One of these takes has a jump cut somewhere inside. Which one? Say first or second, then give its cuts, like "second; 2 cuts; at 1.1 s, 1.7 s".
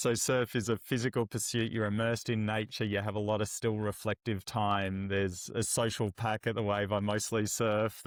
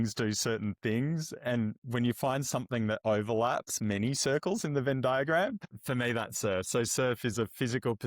second; 1 cut; at 5.7 s